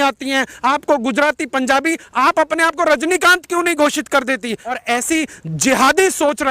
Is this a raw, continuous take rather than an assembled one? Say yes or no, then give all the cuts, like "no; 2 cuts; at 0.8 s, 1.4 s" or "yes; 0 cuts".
no; 1 cut; at 4.8 s